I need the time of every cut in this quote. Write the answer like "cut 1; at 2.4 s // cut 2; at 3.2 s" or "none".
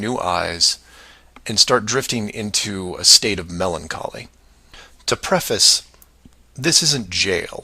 cut 1; at 4.2 s